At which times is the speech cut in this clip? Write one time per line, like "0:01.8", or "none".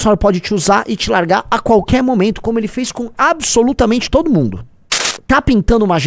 0:05.1

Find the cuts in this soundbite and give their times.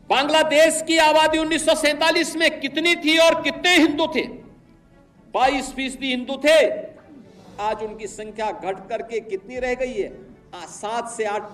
none

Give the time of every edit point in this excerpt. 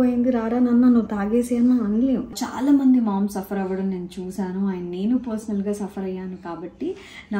0:02.3

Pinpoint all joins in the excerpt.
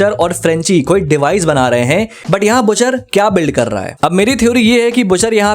0:02.2
0:03.9

